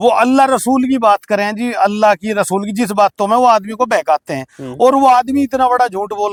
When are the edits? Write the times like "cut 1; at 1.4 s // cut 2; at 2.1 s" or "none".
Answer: none